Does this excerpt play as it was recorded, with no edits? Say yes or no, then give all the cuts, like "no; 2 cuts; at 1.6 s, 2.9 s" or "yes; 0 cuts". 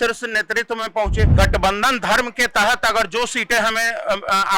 no; 1 cut; at 1.3 s